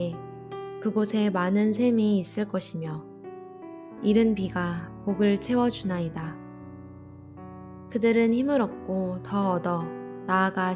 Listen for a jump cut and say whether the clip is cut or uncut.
cut